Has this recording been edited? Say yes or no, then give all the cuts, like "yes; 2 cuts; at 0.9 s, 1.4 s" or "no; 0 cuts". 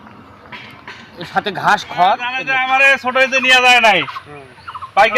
yes; 1 cut; at 2.5 s